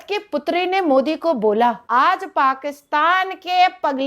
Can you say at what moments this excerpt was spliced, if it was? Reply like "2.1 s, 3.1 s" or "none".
1.8 s